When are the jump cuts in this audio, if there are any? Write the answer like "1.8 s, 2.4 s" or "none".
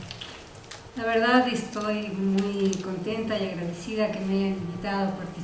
none